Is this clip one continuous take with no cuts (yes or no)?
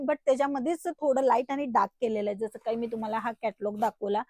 yes